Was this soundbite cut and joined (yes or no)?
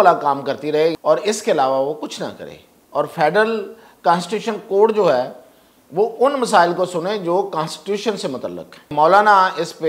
yes